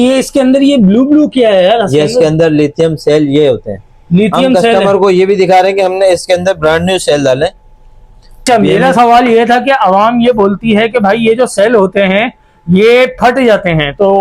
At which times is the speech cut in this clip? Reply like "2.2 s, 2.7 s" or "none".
8.4 s